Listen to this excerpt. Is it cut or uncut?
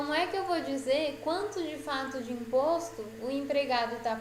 uncut